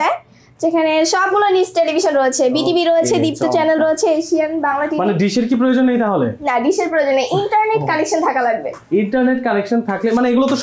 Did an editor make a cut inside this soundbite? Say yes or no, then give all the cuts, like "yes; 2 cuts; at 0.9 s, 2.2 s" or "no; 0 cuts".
no; 0 cuts